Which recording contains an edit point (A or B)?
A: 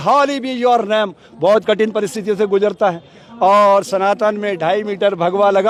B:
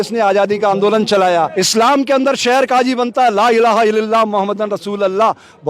B